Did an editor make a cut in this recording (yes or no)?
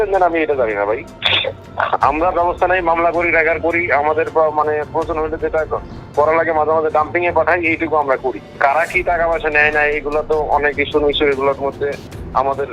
no